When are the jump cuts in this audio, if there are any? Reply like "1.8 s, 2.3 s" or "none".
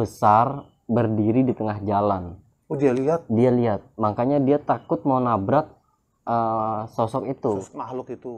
none